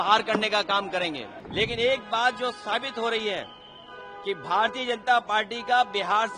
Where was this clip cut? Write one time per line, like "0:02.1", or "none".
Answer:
0:01.4